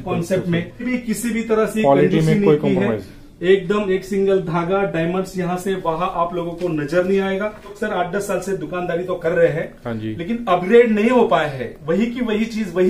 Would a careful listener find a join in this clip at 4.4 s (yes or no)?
no